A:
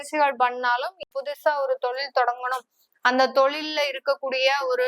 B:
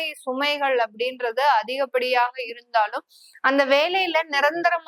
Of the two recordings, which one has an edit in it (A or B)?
A